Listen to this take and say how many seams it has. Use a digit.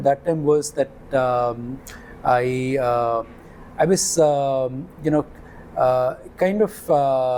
0